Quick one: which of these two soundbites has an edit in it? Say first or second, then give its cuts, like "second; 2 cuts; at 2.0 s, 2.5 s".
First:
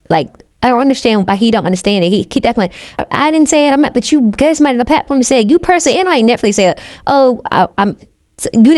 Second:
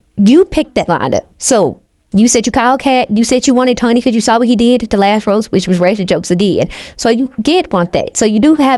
first; 1 cut; at 3.0 s